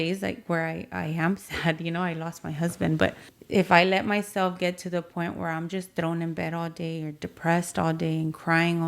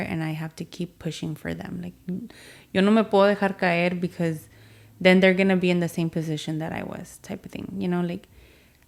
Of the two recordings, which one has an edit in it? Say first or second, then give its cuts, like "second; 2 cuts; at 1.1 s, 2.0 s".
first; 1 cut; at 3.3 s